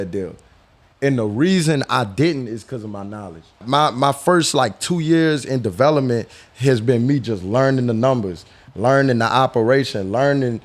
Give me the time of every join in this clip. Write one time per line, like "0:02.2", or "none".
0:03.6